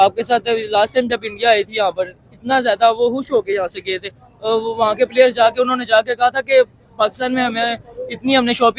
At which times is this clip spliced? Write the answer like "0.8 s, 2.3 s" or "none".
none